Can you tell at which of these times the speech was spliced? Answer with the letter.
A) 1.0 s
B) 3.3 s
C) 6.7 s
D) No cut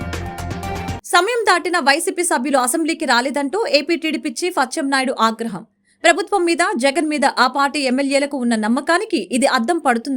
A